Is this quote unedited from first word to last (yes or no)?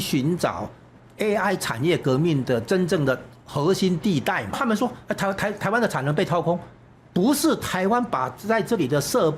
no